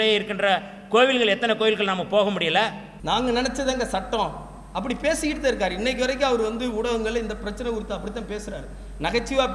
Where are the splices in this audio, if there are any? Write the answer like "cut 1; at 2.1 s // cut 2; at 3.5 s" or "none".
cut 1; at 2.9 s